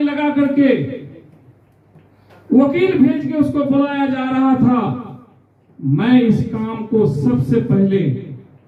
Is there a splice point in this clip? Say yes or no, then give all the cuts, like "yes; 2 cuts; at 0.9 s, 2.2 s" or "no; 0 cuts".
no; 0 cuts